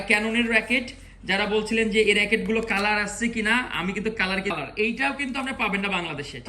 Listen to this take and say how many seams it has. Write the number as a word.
one